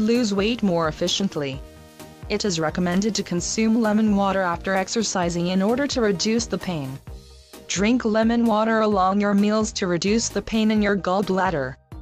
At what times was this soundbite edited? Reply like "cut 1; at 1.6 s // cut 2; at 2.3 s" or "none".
cut 1; at 9.4 s